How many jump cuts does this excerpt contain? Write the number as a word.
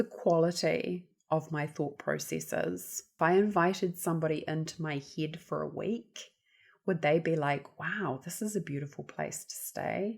one